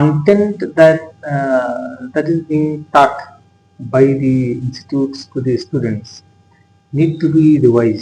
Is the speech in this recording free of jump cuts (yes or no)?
yes